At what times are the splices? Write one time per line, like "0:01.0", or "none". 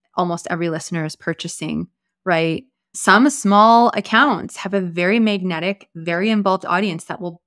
none